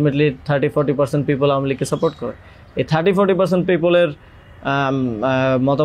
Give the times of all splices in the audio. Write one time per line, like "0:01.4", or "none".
none